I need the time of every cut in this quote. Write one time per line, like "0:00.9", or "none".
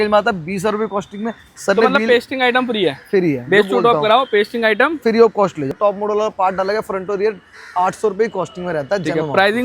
0:01.5
0:05.8